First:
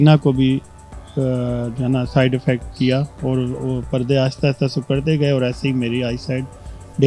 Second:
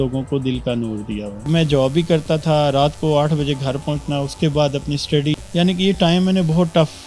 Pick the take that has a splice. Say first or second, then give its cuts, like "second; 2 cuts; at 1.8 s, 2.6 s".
second; 2 cuts; at 1.4 s, 5.4 s